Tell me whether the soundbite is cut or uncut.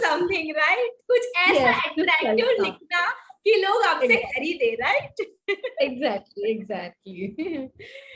uncut